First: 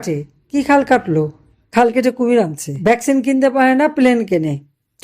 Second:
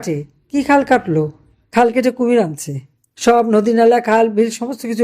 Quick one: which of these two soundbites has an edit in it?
first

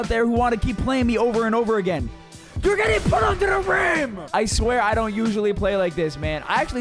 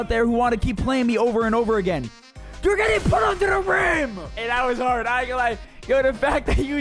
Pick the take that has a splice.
first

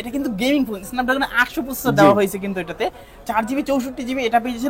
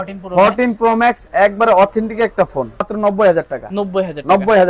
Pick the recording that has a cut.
second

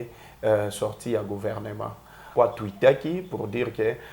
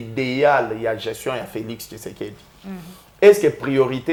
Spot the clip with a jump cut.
first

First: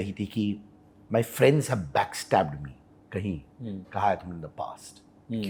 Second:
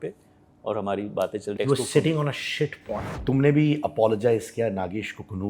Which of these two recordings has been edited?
second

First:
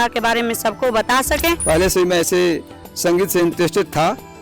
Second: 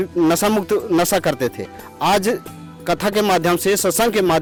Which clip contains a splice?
first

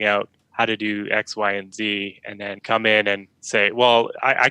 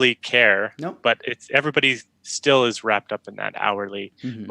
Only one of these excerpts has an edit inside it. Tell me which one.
first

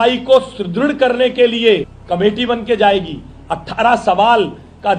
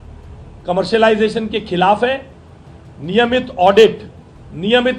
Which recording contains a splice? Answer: first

